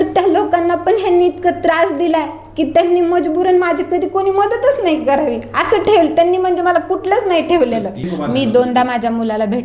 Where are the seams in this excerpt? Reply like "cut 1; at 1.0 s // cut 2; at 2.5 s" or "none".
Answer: cut 1; at 8.1 s